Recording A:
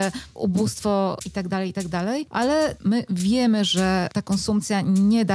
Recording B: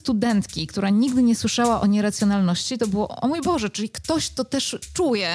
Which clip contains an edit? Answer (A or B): A